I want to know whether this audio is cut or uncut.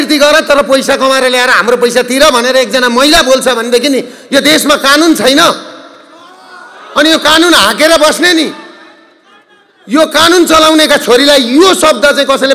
uncut